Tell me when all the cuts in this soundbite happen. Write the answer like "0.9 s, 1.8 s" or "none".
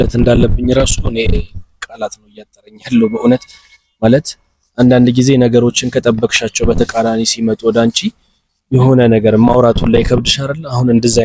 none